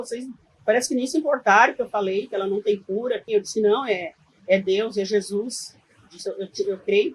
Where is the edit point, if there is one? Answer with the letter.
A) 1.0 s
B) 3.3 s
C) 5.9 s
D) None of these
B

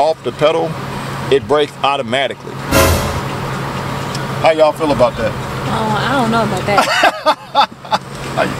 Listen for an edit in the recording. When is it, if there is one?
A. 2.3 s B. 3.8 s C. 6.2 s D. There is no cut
D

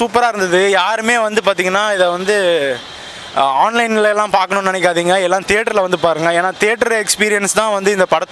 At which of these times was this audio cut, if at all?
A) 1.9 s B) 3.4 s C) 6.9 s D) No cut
D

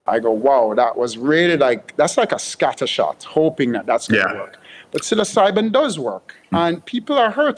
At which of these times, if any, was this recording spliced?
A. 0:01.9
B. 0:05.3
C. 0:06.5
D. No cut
C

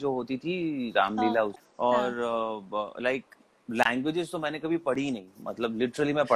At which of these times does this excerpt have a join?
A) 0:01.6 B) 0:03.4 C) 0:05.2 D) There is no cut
A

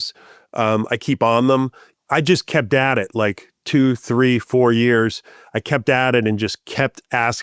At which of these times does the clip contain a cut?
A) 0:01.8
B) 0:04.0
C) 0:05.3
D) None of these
A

